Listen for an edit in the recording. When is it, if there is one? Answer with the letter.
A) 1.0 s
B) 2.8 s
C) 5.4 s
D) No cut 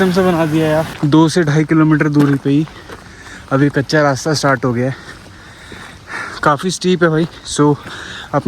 A